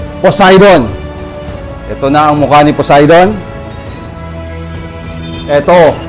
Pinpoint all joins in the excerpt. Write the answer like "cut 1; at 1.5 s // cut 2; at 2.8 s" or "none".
none